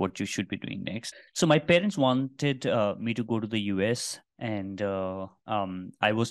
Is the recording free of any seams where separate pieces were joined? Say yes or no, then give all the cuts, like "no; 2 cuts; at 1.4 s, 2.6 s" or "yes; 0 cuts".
no; 1 cut; at 1.0 s